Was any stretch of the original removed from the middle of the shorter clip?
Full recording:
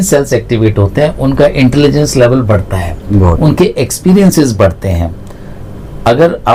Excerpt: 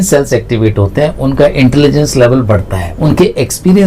yes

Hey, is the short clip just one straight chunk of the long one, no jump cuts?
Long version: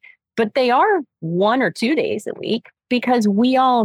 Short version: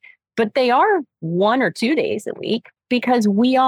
yes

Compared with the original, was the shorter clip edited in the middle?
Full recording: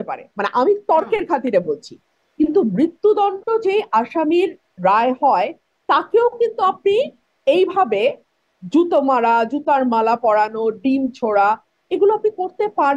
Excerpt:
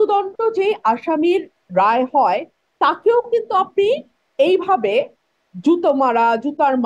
no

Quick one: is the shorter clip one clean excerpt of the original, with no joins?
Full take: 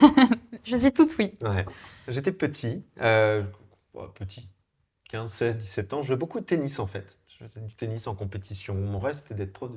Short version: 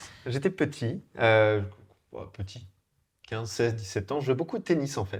yes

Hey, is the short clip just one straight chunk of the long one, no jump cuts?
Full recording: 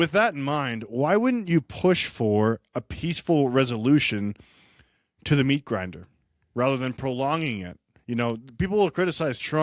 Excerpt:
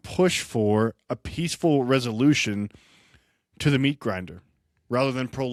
yes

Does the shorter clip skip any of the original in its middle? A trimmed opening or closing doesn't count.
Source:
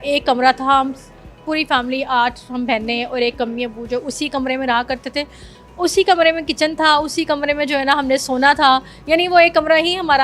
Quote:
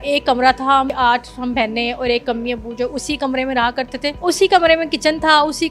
yes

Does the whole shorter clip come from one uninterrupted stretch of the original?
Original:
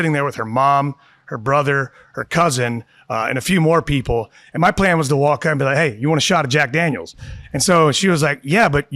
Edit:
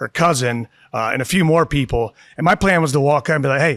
yes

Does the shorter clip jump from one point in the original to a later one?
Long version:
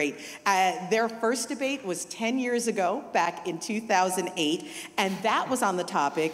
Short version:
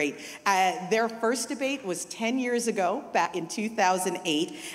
yes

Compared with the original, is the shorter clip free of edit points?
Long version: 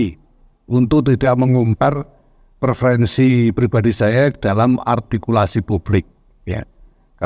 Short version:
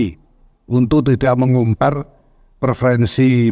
yes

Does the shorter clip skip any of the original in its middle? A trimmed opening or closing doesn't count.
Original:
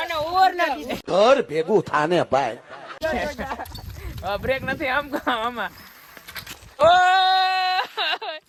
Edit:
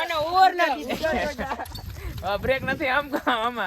yes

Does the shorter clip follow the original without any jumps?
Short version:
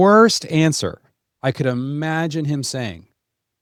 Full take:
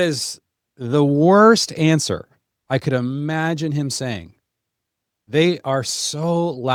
yes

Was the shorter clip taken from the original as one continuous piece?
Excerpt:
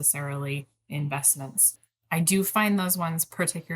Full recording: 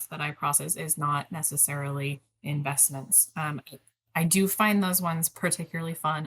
no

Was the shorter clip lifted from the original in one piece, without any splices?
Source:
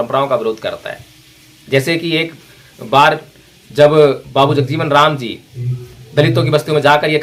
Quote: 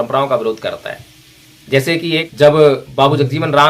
no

